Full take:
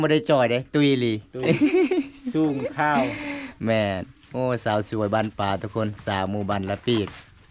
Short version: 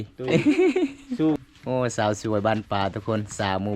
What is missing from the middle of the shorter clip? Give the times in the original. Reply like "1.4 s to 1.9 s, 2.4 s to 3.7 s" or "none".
2.6 s to 4.1 s